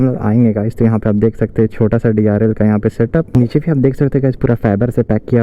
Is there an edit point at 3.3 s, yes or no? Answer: yes